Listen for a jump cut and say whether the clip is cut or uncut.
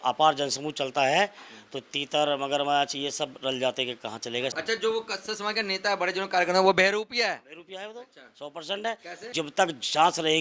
cut